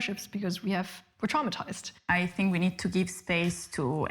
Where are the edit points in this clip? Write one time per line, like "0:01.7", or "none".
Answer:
0:02.0